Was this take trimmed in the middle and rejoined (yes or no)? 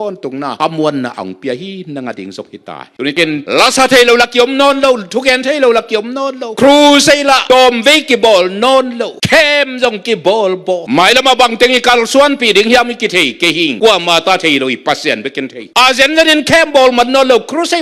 no